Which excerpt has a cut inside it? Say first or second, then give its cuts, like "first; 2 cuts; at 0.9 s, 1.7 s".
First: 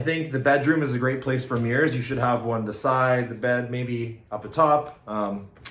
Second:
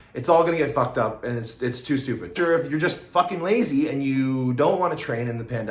second; 1 cut; at 2.3 s